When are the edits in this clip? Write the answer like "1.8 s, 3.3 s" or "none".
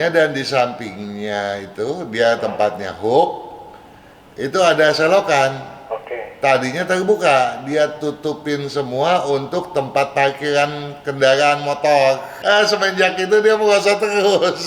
12.3 s